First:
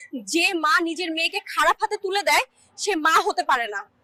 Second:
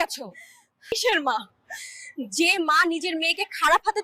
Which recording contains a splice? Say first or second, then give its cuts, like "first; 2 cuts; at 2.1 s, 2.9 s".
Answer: second; 1 cut; at 0.9 s